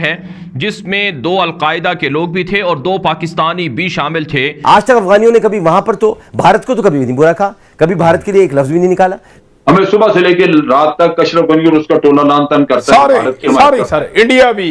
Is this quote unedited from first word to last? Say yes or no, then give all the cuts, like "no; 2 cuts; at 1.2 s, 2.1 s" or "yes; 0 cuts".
no; 2 cuts; at 4.5 s, 9.3 s